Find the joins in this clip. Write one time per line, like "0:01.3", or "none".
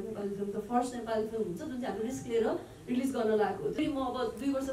0:03.7